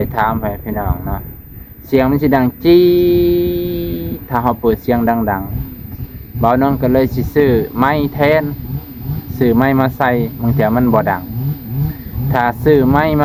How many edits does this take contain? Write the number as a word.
zero